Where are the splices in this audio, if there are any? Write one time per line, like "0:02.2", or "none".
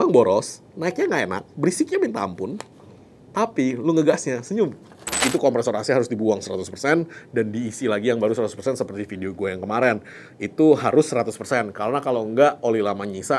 0:05.2